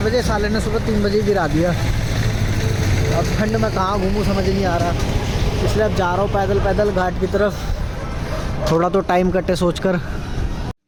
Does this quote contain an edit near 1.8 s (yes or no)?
no